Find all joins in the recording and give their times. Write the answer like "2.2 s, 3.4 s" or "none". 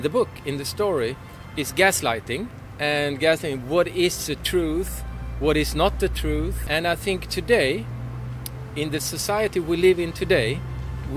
2.6 s, 6.6 s